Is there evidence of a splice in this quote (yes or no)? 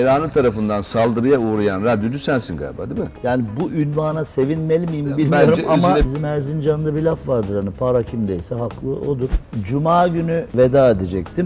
yes